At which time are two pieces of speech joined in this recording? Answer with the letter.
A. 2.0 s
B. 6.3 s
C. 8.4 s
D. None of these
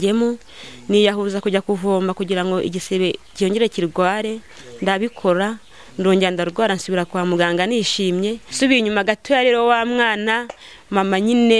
C